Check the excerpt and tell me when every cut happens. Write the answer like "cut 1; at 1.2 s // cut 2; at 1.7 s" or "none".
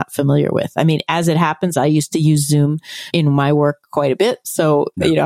cut 1; at 3.1 s